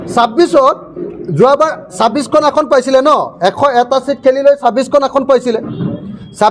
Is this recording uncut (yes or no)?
yes